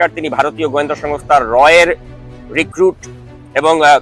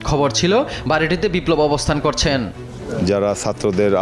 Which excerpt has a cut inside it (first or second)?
second